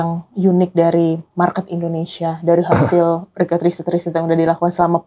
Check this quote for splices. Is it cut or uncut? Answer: uncut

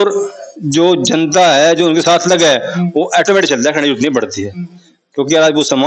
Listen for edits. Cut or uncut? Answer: uncut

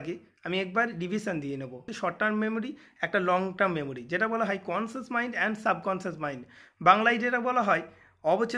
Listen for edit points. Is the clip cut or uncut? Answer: cut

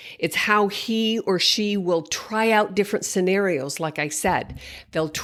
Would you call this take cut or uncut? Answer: uncut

